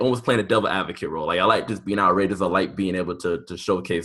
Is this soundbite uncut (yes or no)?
yes